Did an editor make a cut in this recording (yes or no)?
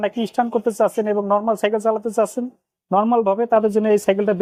no